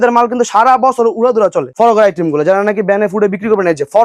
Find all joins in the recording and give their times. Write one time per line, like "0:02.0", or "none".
0:01.7